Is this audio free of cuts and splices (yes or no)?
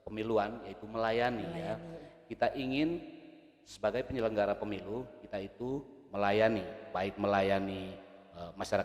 yes